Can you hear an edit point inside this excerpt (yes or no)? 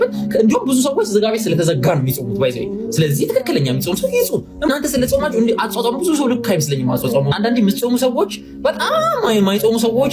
no